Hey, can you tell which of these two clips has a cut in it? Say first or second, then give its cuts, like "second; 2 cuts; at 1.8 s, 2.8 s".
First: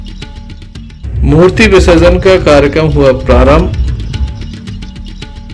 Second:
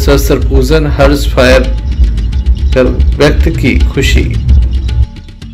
first; 1 cut; at 1.0 s